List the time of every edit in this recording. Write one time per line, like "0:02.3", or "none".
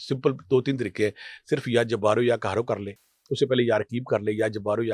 none